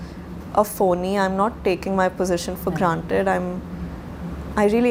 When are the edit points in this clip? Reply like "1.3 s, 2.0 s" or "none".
none